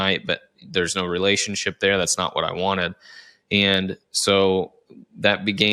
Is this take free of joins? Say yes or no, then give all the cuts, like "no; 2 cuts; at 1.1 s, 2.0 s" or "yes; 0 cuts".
yes; 0 cuts